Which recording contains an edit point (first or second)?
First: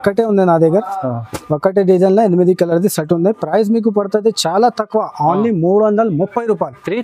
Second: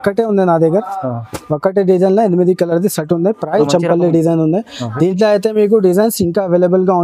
second